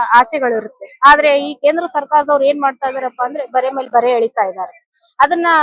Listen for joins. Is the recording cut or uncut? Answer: uncut